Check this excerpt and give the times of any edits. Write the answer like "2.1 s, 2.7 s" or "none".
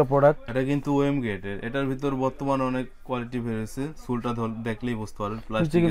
none